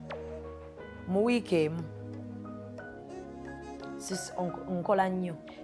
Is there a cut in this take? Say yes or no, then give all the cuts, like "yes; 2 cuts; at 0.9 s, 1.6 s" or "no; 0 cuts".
no; 0 cuts